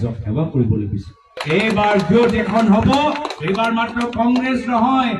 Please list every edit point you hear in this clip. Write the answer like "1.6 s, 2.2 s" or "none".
1.3 s

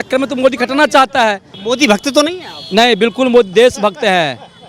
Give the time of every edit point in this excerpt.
1.5 s

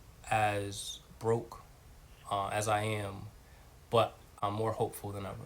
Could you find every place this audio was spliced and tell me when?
4.3 s

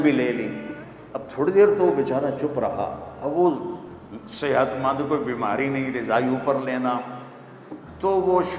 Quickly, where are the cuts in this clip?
none

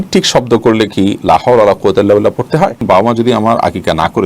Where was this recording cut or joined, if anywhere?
2.8 s

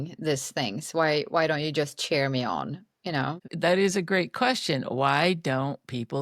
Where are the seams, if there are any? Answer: 3.5 s

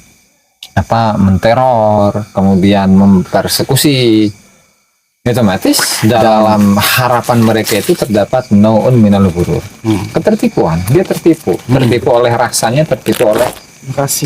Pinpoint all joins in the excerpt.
6.2 s

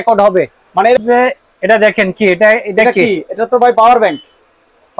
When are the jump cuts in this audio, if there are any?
1.0 s

